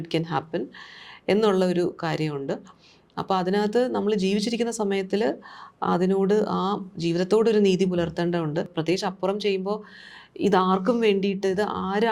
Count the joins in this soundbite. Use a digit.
1